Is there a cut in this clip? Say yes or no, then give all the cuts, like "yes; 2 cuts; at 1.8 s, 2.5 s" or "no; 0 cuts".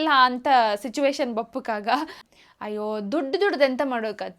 yes; 1 cut; at 2.2 s